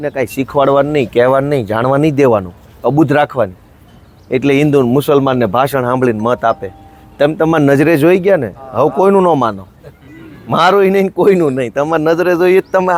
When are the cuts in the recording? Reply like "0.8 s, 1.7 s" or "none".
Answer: none